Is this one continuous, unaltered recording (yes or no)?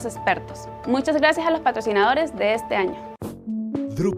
yes